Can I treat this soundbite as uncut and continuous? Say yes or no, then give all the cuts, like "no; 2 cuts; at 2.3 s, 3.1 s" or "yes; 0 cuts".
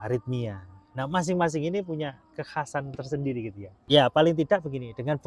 no; 1 cut; at 3.8 s